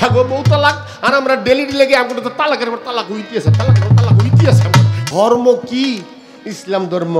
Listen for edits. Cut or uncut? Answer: cut